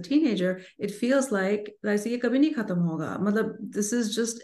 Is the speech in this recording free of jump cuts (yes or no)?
yes